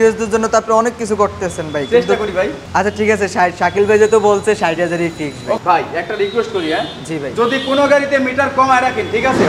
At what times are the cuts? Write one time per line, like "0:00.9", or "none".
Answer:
0:02.6
0:05.6

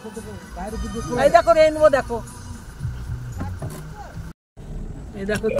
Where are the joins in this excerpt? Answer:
0:04.2

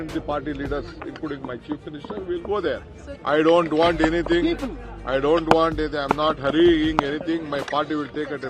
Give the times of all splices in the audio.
0:03.1

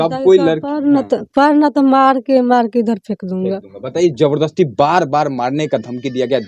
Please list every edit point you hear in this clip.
none

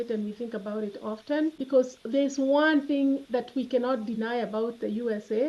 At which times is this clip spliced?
0:01.6

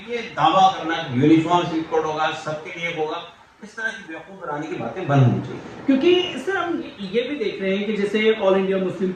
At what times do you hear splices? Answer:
none

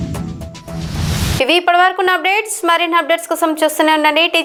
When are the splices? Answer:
none

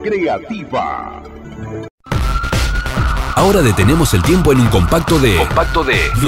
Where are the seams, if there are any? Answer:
0:02.0

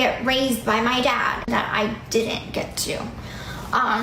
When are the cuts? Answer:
0:01.5

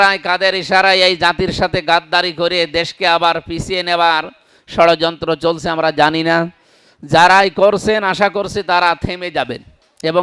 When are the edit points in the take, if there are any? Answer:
none

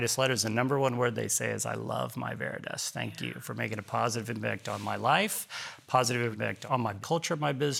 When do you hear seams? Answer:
0:06.6

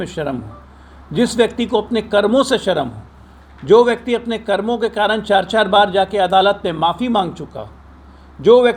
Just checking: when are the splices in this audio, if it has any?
none

